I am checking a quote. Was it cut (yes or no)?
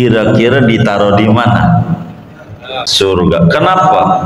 yes